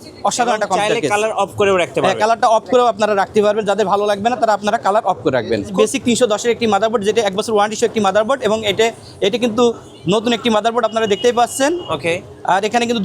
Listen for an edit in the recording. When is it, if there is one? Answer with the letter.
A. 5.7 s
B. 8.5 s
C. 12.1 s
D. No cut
A